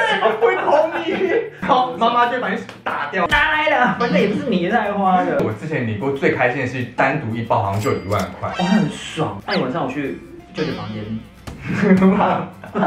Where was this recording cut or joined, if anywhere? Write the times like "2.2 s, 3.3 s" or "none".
1.6 s, 3.3 s, 5.4 s, 9.4 s